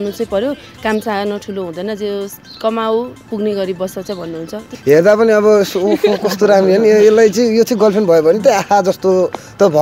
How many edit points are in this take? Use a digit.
1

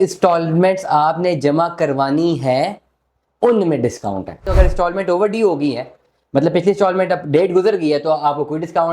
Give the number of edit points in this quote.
1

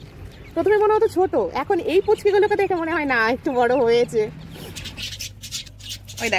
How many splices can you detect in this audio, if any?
1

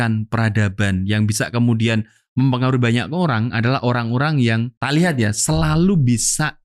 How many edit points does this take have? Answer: 1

